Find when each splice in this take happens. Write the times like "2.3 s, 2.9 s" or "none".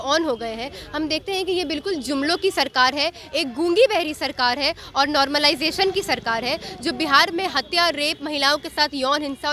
none